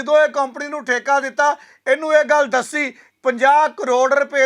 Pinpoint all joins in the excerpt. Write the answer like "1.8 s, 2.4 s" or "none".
3.0 s